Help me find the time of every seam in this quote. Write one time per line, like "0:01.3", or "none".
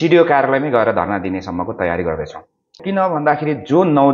0:02.8